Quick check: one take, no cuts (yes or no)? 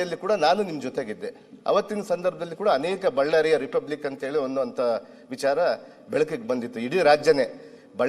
yes